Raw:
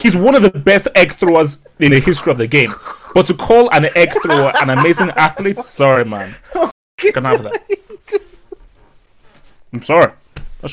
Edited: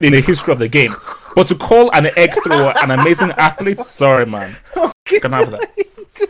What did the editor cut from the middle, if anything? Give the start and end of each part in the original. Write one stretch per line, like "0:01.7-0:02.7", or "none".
0:06.8-0:06.9